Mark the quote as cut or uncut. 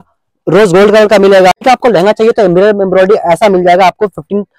cut